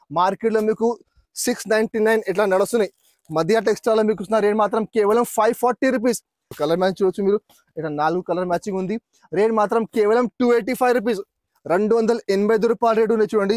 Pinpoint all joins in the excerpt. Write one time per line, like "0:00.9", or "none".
0:06.5